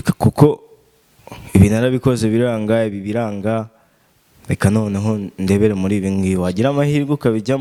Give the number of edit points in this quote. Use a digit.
0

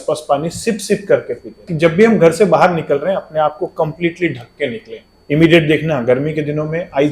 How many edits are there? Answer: 2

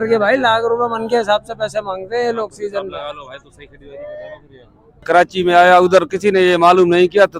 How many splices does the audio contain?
1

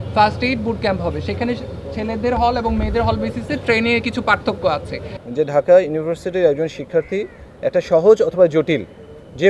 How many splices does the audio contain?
1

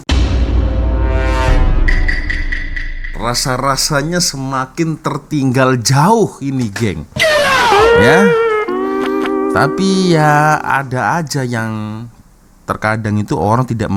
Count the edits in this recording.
0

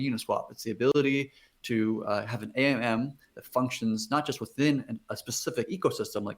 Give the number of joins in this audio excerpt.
1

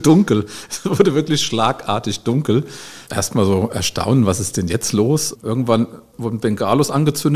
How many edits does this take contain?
3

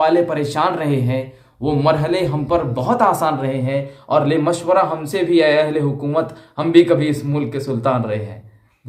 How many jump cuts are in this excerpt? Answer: 0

